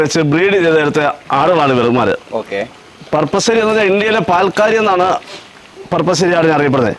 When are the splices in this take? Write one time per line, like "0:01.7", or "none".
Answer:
none